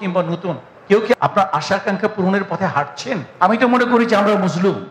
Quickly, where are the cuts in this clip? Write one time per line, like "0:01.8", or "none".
0:03.3